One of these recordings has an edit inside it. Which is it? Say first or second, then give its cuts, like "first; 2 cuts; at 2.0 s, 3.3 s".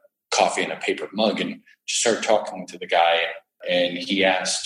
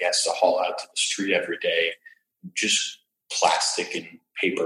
first; 1 cut; at 3.6 s